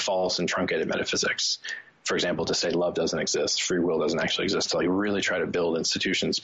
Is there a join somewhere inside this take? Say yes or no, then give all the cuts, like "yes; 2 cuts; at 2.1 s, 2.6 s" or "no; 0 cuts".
no; 0 cuts